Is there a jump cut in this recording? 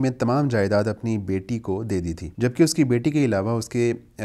yes; 1 cut; at 2.2 s

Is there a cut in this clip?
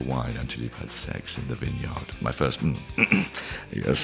yes; 1 cut; at 2.0 s

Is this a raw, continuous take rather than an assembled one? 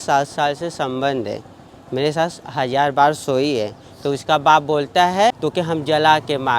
no; 1 cut; at 5.4 s

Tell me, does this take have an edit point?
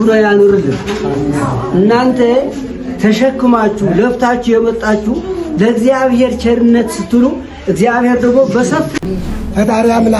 yes; 1 cut; at 8.9 s

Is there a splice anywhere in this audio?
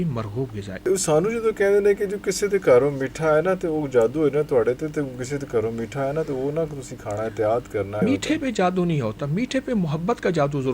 yes; 2 cuts; at 0.9 s, 8.0 s

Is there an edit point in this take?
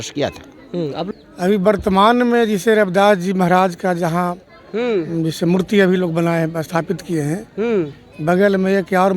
yes; 1 cut; at 1.1 s

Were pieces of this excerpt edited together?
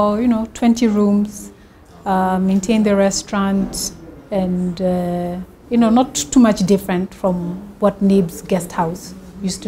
no; 0 cuts

